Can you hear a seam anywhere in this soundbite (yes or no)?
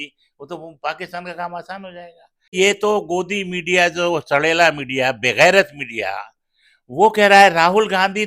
yes